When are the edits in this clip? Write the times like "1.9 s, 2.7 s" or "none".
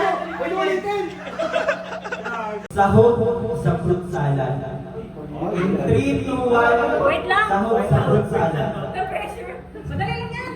2.7 s